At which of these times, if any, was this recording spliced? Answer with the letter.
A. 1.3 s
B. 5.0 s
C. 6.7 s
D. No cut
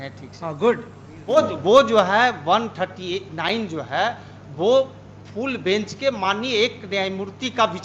A